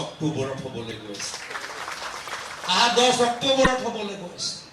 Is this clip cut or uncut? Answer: uncut